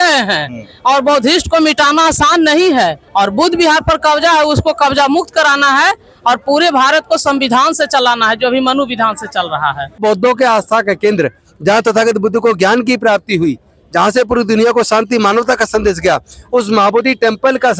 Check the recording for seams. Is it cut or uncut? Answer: cut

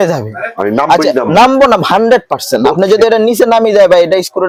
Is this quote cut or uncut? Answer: uncut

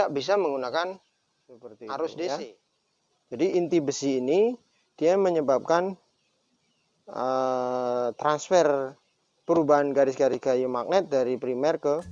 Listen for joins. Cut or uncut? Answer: cut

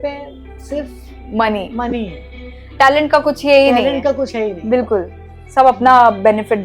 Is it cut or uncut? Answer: uncut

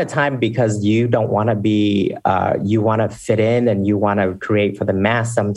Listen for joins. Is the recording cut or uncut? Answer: uncut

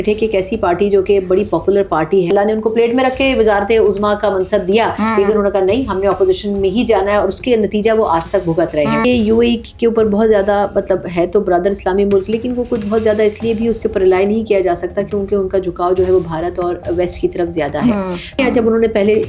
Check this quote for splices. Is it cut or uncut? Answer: cut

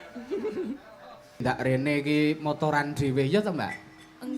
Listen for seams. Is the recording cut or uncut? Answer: cut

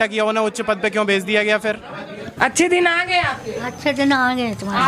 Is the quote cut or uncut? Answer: cut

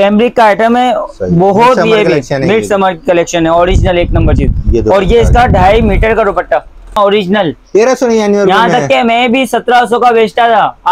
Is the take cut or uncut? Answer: cut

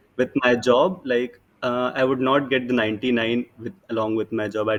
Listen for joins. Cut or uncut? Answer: uncut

